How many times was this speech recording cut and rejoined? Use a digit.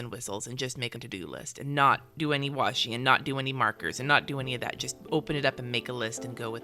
1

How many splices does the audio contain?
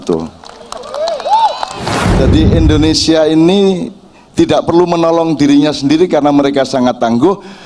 1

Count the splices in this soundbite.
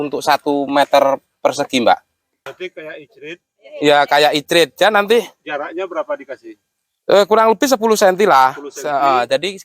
1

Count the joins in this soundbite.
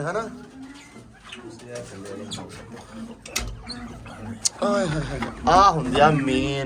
0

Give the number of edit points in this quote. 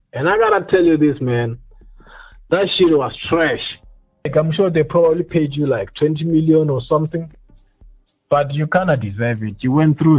1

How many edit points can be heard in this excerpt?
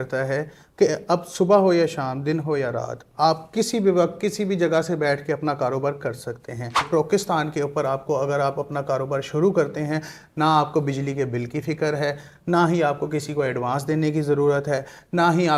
0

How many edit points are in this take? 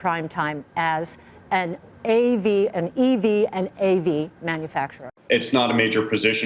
1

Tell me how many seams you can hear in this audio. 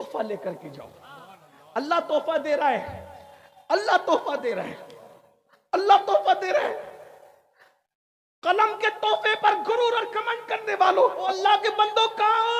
1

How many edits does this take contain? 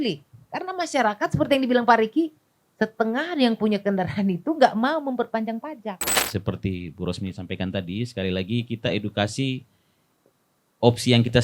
1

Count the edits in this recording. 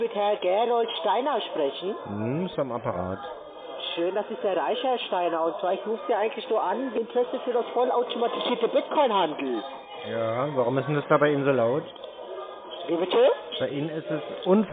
0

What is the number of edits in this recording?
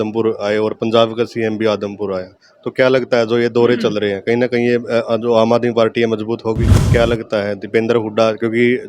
1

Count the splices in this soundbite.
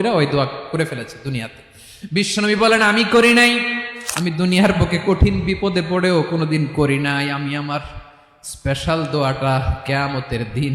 1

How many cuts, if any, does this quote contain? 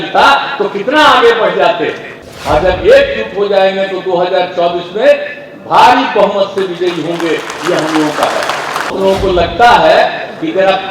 2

